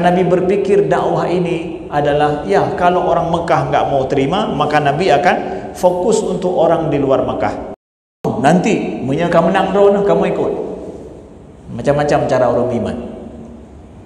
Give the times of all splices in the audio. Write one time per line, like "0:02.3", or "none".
0:08.3